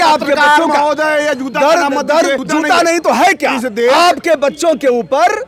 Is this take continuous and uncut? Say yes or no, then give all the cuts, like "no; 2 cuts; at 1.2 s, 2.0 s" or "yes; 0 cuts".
no; 1 cut; at 2.4 s